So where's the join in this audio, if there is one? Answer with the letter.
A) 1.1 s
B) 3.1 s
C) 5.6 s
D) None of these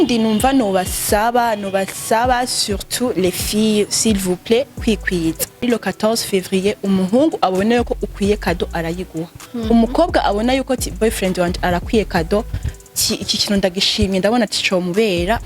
C